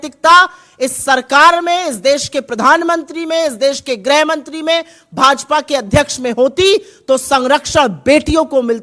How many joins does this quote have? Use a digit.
0